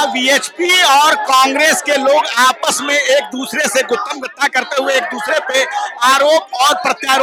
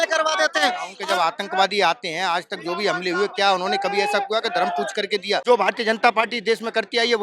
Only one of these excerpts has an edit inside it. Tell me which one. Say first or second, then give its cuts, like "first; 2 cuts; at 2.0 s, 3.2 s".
second; 2 cuts; at 0.9 s, 5.4 s